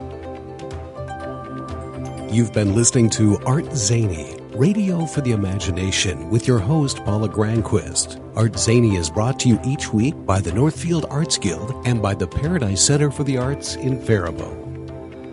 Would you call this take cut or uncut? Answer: cut